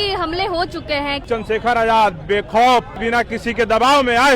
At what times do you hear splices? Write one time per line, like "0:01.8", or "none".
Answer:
0:01.2
0:03.0